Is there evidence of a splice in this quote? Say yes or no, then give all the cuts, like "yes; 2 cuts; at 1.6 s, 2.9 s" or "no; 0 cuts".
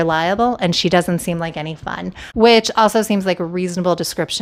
no; 0 cuts